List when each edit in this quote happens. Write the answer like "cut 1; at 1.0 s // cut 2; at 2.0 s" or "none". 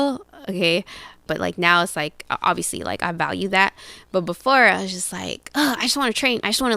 cut 1; at 1.3 s